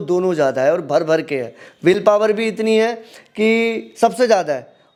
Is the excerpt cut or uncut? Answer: uncut